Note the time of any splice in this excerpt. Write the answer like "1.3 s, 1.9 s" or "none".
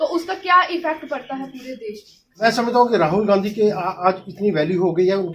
2.4 s